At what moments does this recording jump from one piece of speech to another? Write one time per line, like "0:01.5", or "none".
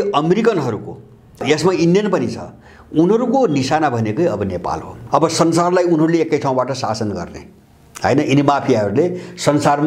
0:01.4
0:04.9

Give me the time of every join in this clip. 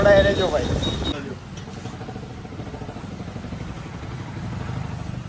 none

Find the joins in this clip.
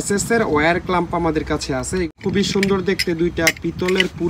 0:02.1

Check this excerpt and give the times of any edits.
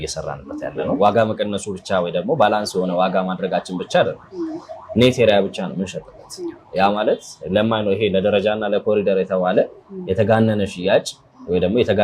0:01.0

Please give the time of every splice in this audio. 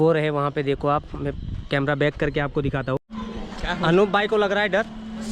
0:03.0

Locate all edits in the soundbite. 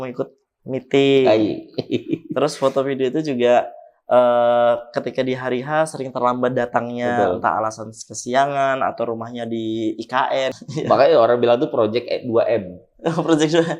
0:10.6

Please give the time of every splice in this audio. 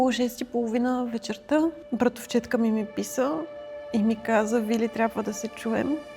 0:01.8

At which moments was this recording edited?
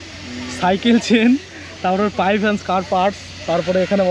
none

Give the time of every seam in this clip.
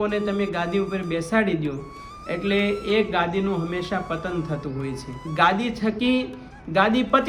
0:05.3

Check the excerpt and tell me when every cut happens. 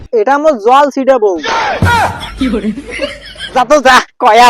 0:03.3

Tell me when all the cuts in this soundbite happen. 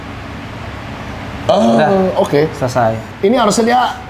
none

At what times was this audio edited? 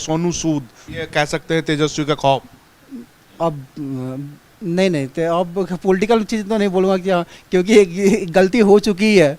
0:00.9

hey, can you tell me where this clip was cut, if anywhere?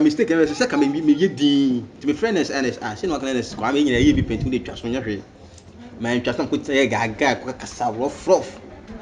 none

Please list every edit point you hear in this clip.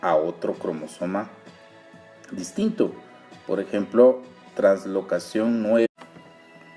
none

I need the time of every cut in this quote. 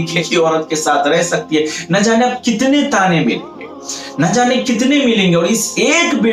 none

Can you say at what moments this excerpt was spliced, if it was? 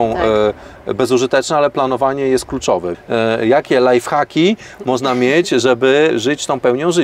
0:02.9
0:06.1

